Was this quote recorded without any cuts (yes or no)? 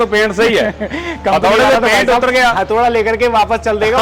yes